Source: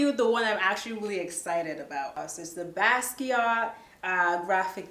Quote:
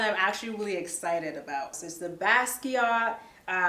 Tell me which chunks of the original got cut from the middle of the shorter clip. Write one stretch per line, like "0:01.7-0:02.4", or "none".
0:02.2-0:02.3